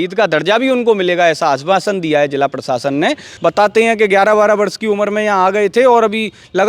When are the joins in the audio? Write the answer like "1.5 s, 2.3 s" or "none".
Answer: 3.3 s